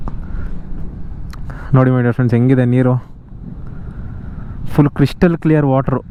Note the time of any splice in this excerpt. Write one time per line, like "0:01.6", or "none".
none